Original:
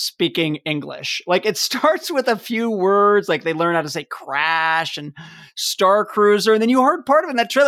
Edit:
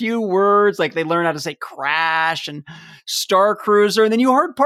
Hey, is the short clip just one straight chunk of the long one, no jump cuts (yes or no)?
yes